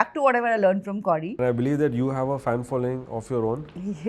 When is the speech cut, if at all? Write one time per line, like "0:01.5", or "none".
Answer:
0:01.3